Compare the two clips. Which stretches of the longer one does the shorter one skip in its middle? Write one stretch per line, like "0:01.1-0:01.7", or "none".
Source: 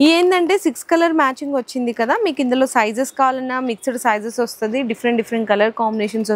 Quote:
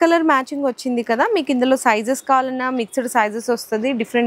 none